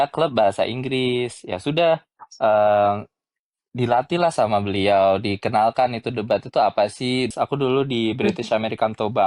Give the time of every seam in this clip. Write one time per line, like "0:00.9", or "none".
0:07.3

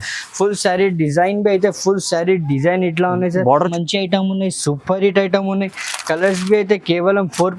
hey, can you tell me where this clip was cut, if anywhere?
0:03.7

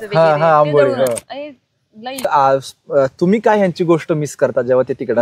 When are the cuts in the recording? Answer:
0:02.2

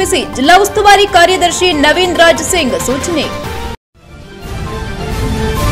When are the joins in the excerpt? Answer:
0:03.8

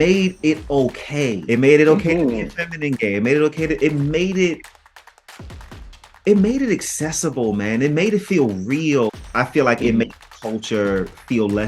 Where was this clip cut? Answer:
0:01.4
0:09.1

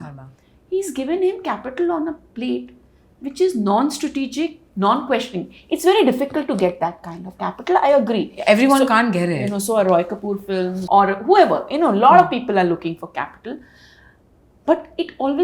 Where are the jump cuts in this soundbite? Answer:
none

